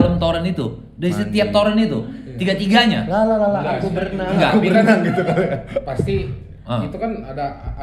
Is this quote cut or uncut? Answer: uncut